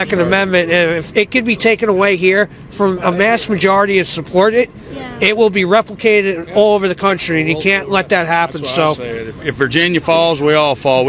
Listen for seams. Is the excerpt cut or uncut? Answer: uncut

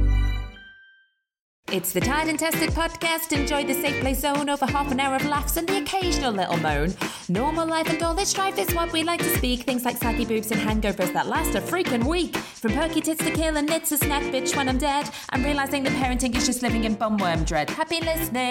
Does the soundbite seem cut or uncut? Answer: cut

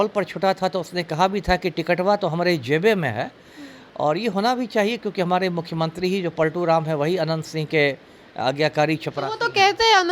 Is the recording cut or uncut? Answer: uncut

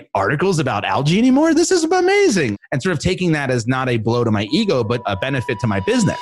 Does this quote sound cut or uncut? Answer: cut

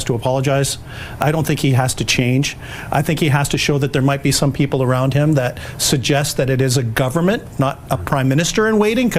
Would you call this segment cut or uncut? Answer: uncut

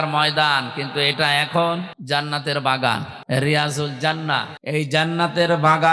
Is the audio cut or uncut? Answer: cut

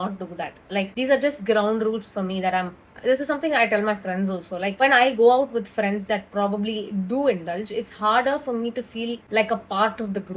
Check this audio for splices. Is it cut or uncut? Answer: uncut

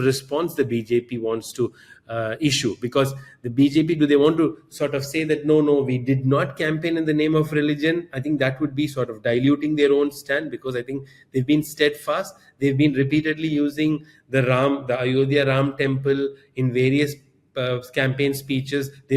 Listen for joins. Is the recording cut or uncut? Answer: uncut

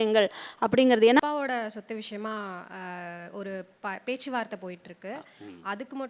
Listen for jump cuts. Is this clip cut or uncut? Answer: cut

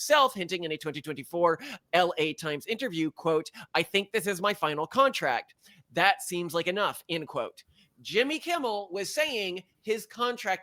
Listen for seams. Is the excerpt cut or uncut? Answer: uncut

